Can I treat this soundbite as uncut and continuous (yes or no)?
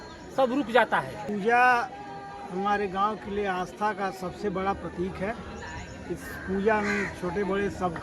no